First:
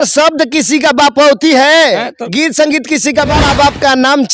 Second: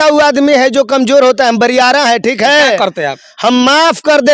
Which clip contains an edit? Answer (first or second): first